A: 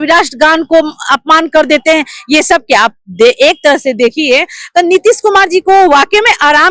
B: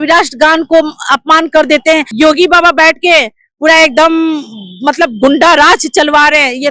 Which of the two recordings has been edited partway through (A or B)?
B